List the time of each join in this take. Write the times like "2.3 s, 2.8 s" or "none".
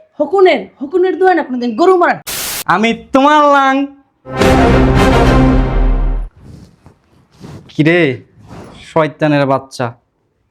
2.3 s